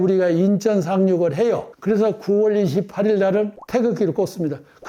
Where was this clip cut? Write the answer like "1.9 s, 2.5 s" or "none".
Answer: 3.6 s